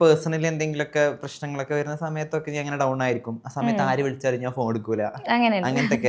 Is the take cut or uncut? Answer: uncut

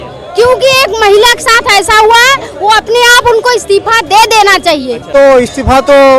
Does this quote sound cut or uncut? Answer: cut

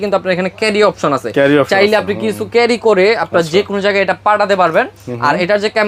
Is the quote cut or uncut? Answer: uncut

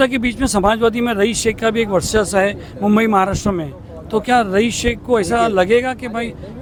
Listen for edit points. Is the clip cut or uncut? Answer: uncut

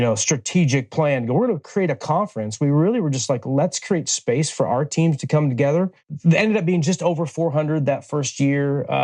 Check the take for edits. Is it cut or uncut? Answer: cut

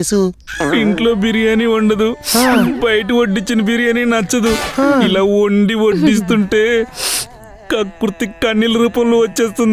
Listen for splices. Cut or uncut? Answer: uncut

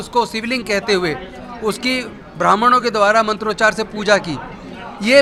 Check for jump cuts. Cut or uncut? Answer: uncut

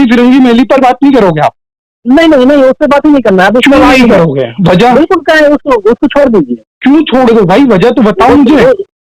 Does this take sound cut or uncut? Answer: uncut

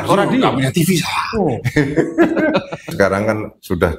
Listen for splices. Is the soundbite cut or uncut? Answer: cut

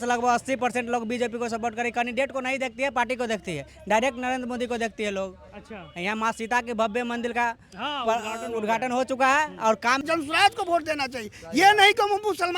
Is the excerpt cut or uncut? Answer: cut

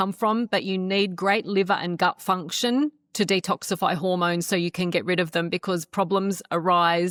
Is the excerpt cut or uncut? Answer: uncut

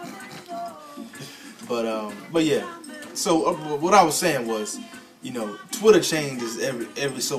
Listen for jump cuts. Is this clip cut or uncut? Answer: uncut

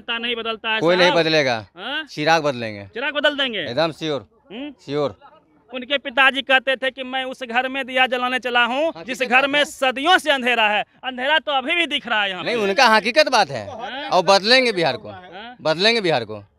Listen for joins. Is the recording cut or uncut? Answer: uncut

